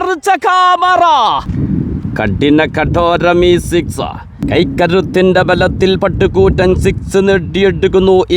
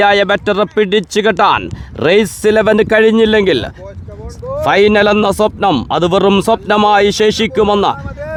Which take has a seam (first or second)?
first